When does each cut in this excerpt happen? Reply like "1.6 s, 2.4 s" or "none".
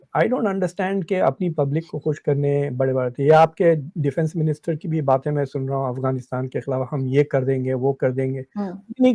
none